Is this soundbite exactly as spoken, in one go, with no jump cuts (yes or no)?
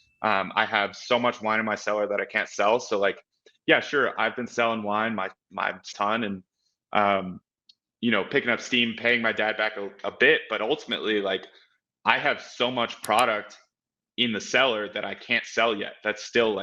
yes